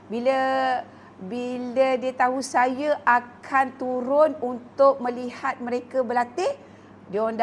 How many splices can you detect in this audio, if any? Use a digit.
0